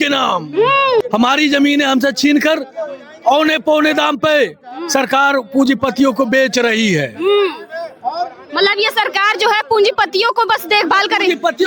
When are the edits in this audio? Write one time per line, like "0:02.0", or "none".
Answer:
0:01.0